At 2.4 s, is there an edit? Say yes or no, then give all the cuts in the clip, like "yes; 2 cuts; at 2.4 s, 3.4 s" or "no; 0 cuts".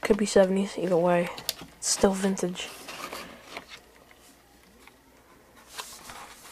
no; 0 cuts